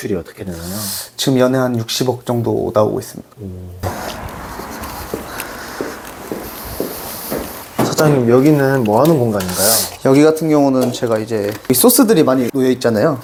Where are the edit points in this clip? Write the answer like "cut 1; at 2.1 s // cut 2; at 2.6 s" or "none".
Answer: none

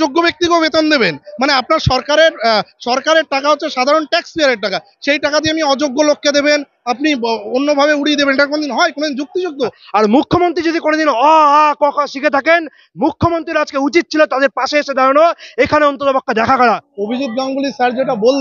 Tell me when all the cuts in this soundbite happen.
cut 1; at 9.8 s // cut 2; at 16.6 s

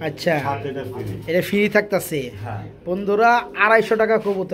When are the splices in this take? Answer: none

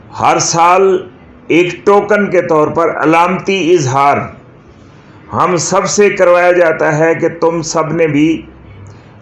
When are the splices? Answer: none

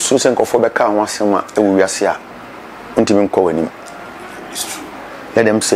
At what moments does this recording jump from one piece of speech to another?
none

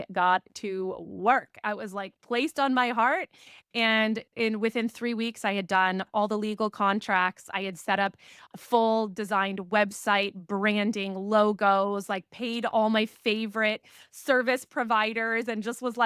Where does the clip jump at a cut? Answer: none

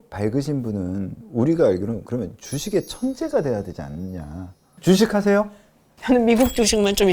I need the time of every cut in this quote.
cut 1; at 1.2 s // cut 2; at 4.7 s

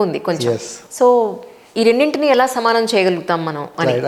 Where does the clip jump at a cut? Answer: none

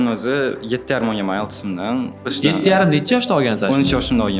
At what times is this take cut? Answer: cut 1; at 2.3 s

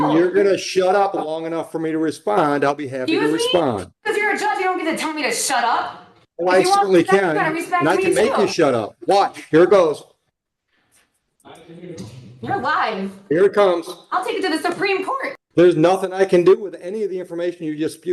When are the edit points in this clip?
cut 1; at 15.3 s

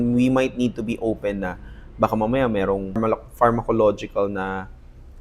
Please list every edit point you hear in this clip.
cut 1; at 3.0 s

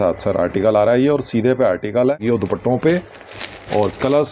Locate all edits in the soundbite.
cut 1; at 2.2 s

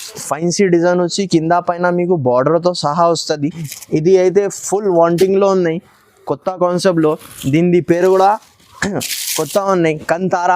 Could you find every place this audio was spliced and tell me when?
cut 1; at 3.7 s

